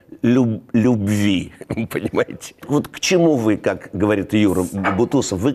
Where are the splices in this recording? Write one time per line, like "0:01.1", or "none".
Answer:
0:02.6